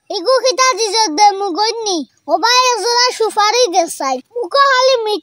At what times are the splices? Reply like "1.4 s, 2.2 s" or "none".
2.1 s